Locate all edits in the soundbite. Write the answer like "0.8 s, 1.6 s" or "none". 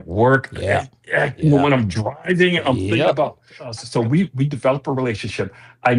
3.8 s